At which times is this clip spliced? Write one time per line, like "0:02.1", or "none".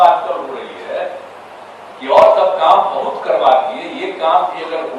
none